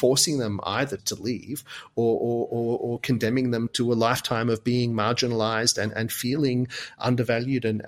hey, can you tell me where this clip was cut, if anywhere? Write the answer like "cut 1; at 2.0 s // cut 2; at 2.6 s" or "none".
cut 1; at 1.0 s // cut 2; at 3.7 s